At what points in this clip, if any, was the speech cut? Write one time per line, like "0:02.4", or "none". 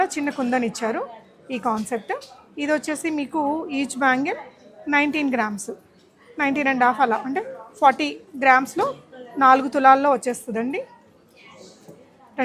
none